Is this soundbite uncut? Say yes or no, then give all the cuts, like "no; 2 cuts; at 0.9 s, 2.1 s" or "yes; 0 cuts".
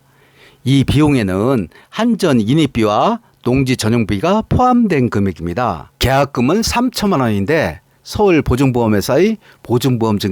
no; 1 cut; at 5.9 s